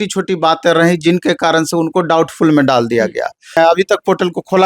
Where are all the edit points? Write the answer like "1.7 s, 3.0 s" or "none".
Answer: 3.6 s